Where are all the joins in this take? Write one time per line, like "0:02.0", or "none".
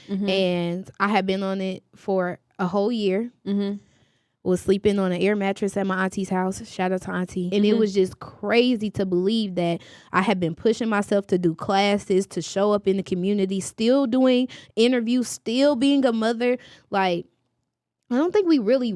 0:07.5